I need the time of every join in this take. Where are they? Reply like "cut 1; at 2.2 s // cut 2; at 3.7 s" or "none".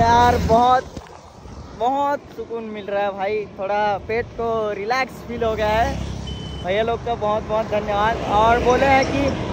none